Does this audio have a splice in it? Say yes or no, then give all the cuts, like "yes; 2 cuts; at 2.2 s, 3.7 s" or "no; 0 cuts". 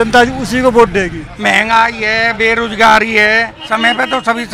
yes; 2 cuts; at 1.3 s, 3.6 s